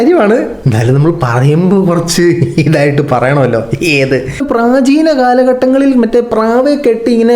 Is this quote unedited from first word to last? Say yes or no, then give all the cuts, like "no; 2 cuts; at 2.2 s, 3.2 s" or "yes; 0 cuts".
no; 1 cut; at 4.4 s